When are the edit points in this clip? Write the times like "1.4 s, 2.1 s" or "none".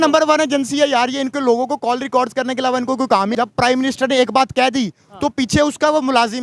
3.3 s